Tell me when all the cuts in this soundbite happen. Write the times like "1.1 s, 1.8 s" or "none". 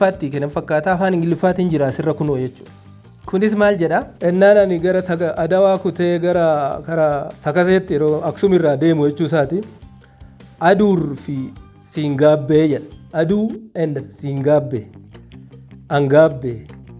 4.1 s